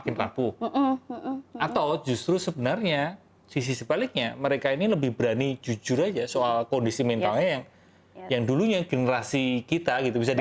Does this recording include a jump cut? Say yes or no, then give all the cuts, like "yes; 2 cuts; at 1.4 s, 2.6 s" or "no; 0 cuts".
no; 0 cuts